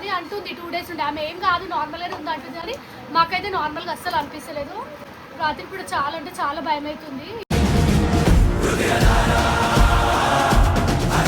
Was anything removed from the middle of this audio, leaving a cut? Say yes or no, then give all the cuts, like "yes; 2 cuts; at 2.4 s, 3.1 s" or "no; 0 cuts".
no; 0 cuts